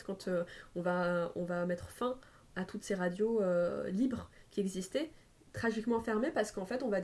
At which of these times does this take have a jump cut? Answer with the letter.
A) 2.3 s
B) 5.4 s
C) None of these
B